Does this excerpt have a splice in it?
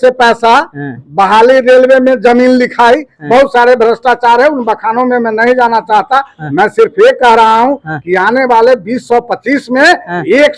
no; 0 cuts

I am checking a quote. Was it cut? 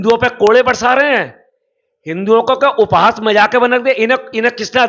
no; 0 cuts

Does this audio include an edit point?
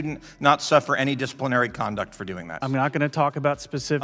yes; 1 cut; at 2.6 s

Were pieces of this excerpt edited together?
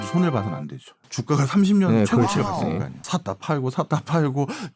yes; 2 cuts; at 1.0 s, 3.0 s

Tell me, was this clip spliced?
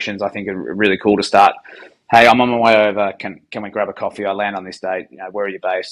no; 0 cuts

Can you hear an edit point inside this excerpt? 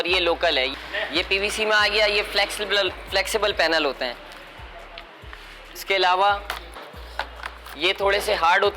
no; 0 cuts

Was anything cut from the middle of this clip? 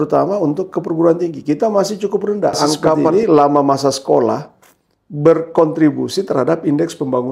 yes; 1 cut; at 3.0 s

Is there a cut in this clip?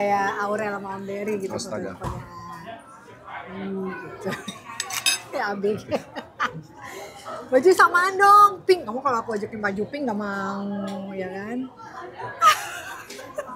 no; 0 cuts

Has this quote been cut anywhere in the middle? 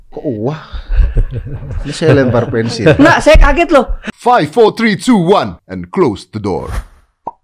yes; 1 cut; at 4.1 s

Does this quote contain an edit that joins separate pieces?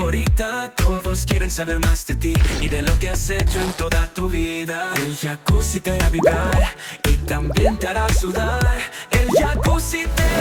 no; 0 cuts

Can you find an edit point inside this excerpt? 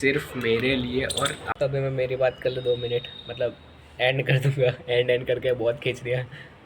yes; 1 cut; at 1.5 s

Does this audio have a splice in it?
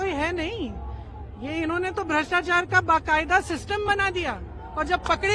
no; 0 cuts

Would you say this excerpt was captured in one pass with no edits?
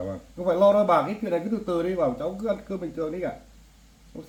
yes; 0 cuts

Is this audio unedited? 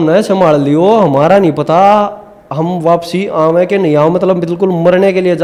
yes; 0 cuts

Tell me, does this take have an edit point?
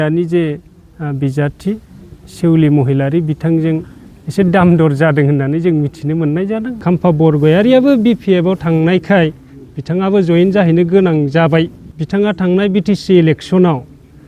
yes; 2 cuts; at 6.8 s, 11.9 s

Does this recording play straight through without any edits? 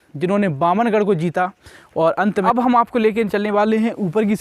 no; 1 cut; at 2.4 s

